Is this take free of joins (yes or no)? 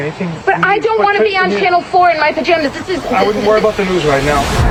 yes